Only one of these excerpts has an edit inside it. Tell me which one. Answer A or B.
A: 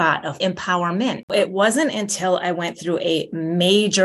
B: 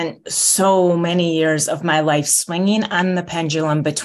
A